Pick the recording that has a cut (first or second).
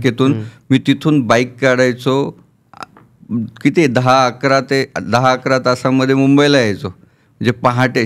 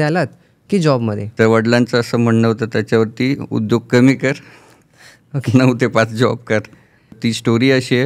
second